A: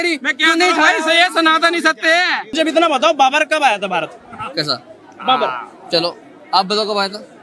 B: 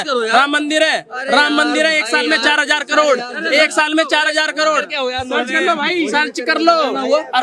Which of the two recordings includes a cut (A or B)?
A